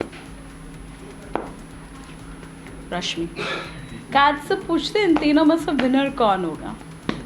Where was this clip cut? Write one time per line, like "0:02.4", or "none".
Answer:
0:03.8